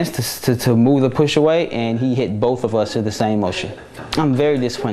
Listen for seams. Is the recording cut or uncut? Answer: cut